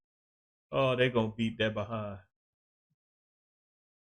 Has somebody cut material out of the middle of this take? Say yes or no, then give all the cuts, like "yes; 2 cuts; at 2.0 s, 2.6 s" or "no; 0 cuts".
no; 0 cuts